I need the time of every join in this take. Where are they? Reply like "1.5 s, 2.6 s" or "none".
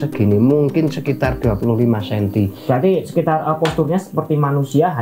none